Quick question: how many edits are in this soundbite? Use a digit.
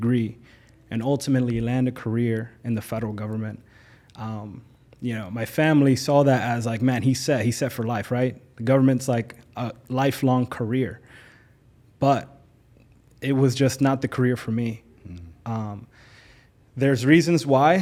0